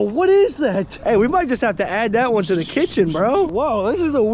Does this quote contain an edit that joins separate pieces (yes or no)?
yes